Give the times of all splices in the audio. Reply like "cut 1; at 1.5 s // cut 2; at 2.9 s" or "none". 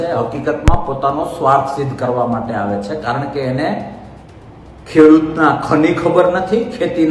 none